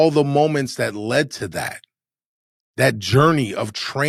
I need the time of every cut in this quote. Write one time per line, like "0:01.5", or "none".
none